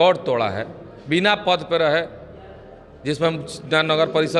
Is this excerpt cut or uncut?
uncut